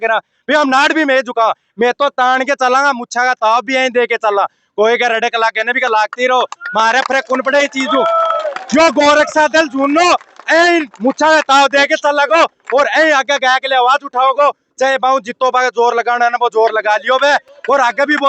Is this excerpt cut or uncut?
uncut